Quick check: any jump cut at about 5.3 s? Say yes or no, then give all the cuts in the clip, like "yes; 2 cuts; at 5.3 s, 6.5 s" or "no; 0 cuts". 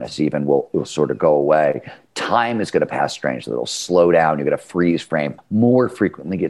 yes; 1 cut; at 5.3 s